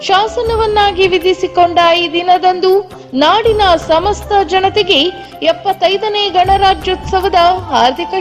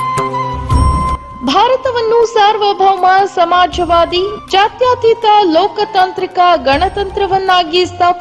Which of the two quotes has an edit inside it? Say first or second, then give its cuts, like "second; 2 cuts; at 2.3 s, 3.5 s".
second; 1 cut; at 1.2 s